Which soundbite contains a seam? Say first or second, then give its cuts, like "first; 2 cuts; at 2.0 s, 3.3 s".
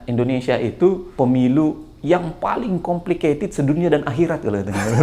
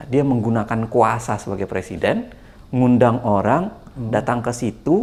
first; 1 cut; at 1.0 s